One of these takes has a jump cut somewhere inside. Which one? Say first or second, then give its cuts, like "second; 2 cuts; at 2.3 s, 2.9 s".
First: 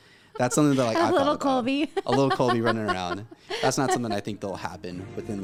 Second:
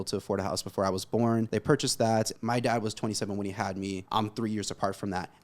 second; 3 cuts; at 1.5 s, 2.3 s, 4.0 s